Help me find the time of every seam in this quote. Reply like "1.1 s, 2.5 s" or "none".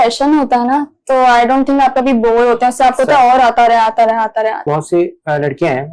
4.6 s